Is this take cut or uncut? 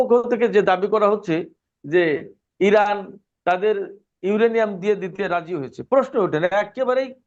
uncut